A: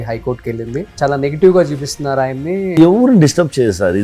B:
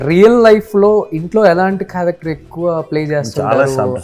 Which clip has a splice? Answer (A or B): A